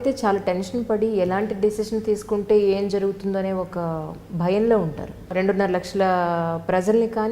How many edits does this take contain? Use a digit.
1